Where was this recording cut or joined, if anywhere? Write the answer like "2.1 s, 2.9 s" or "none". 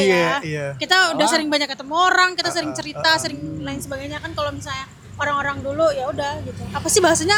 none